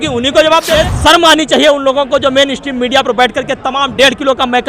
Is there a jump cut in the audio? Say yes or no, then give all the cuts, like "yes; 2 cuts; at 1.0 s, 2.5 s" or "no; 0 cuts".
yes; 1 cut; at 0.9 s